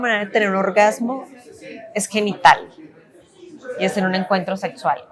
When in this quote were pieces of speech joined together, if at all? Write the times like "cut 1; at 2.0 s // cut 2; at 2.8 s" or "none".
none